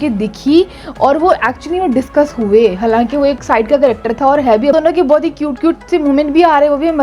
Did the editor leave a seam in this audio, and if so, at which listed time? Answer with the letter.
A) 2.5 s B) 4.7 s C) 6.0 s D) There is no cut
B